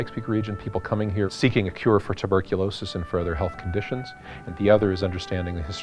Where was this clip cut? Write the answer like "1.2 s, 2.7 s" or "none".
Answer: none